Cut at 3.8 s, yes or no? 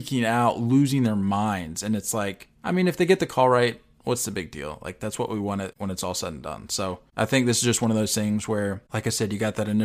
no